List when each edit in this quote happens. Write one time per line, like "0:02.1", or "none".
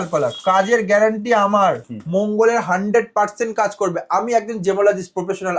0:01.9